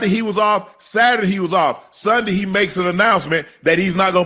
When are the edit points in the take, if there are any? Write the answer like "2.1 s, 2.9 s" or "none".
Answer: none